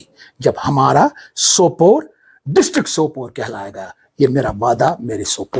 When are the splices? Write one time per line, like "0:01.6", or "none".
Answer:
none